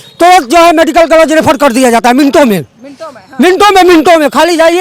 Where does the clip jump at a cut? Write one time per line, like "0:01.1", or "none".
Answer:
none